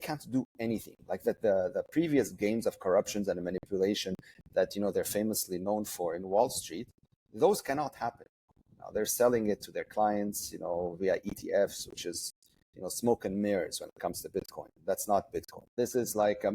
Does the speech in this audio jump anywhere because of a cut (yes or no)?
yes